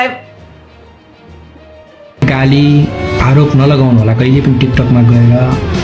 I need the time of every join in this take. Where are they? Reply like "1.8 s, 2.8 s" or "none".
2.2 s